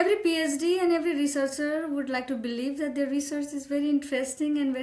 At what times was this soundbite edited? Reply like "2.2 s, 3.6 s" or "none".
none